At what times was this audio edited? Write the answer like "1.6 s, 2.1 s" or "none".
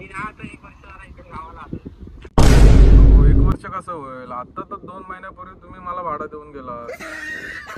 none